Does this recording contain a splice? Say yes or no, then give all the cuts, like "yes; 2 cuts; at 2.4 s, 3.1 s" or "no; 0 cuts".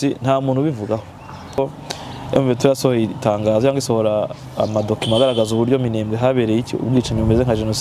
yes; 1 cut; at 1.6 s